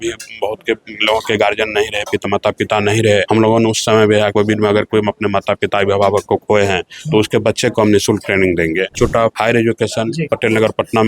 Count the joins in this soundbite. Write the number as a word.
four